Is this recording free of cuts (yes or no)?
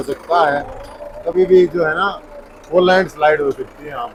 yes